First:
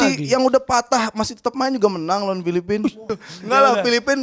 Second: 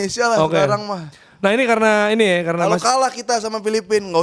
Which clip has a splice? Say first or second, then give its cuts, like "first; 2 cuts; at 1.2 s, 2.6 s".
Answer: first; 1 cut; at 3.1 s